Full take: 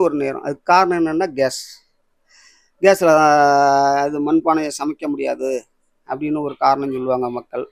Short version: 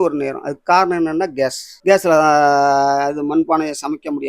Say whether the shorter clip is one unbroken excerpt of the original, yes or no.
no